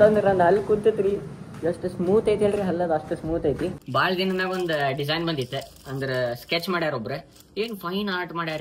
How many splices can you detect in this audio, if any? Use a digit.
1